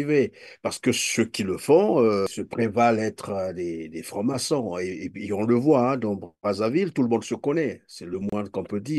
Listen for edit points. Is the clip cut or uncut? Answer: cut